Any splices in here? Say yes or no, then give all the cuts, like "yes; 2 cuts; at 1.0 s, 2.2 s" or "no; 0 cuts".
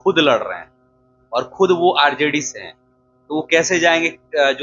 no; 0 cuts